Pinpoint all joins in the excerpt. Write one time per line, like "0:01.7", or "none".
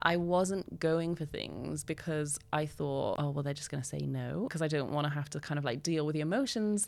0:03.2
0:04.5

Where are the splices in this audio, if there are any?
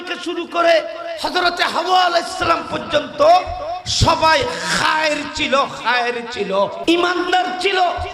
0:06.8

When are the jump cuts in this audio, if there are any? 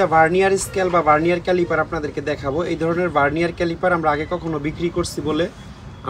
none

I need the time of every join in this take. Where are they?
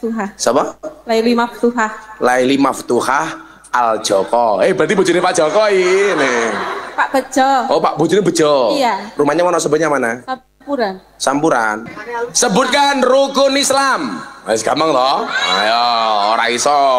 0:11.8

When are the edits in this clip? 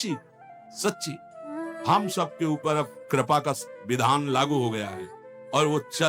none

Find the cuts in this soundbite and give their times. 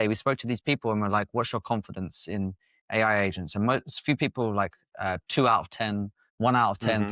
0:06.2

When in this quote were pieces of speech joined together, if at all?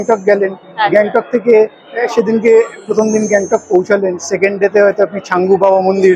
none

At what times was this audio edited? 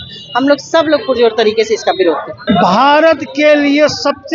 0:02.4

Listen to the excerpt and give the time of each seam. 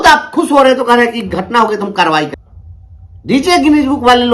0:02.3

